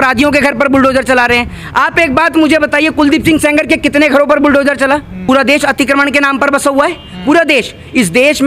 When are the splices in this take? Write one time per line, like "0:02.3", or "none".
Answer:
0:05.1